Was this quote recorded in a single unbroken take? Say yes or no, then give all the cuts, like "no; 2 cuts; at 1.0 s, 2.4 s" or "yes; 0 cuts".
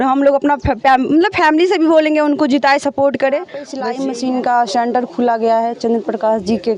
no; 1 cut; at 3.8 s